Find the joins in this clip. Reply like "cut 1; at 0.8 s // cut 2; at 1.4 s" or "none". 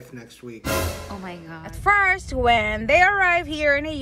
cut 1; at 1.7 s

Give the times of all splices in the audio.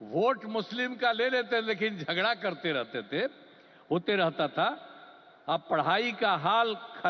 none

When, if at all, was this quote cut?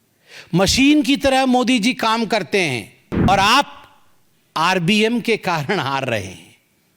cut 1; at 3.3 s

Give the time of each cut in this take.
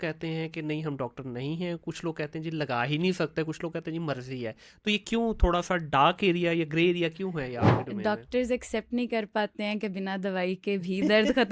none

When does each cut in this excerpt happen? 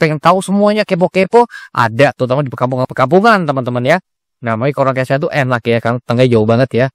none

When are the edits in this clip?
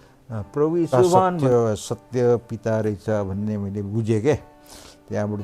cut 1; at 1.4 s

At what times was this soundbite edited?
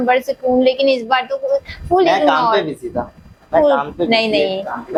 none

